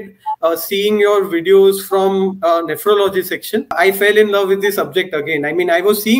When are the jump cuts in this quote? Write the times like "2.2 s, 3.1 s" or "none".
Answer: 3.7 s